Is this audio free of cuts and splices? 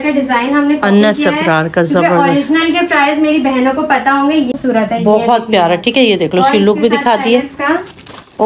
no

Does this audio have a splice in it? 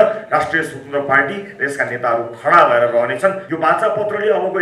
yes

